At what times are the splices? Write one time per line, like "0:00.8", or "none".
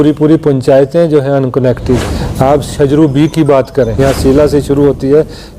0:02.2
0:04.0

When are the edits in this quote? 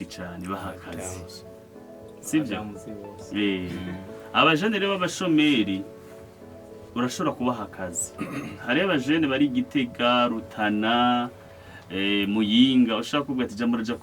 none

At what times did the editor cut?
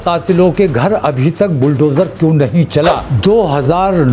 0:03.1

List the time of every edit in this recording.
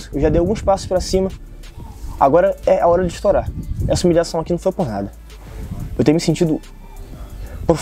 none

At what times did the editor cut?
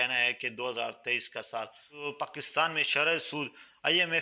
0:01.8

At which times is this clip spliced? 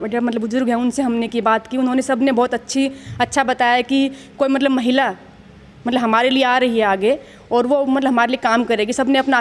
none

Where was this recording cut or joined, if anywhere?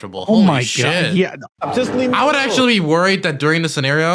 0:01.5

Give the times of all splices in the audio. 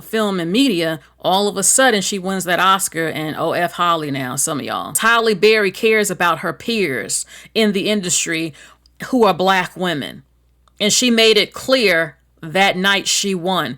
0:05.0

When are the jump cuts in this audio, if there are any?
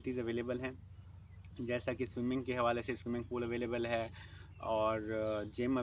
none

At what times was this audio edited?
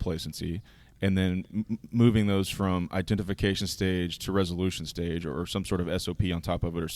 none

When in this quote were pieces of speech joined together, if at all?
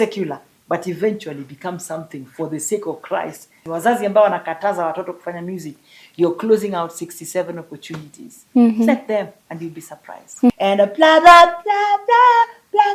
0:03.7
0:10.5

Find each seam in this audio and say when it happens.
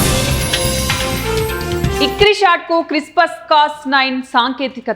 0:01.9

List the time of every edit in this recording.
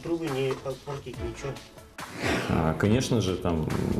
0:02.0

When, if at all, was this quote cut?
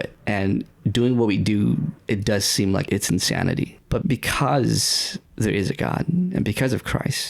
0:02.8
0:03.8

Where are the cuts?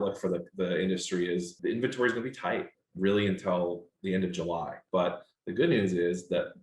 0:01.5
0:02.8
0:04.8

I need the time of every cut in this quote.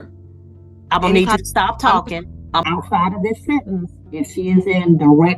0:02.6

